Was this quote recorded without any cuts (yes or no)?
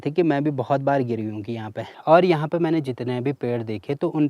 no